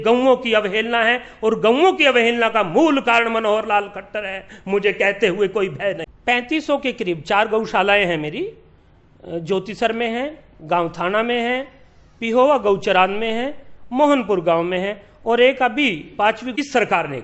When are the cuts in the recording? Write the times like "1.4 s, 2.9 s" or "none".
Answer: 6.1 s, 16.4 s